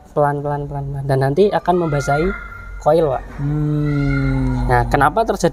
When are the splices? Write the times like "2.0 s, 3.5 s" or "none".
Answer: none